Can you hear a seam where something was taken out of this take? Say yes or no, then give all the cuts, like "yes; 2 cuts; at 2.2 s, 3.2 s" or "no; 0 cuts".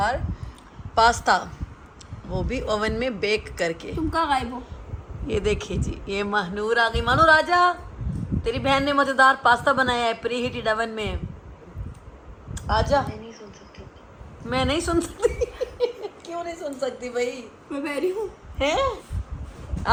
no; 0 cuts